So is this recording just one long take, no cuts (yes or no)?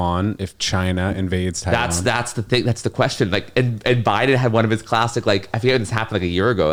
yes